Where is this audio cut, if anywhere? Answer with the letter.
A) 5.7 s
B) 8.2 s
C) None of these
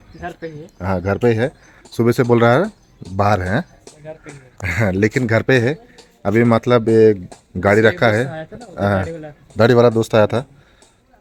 C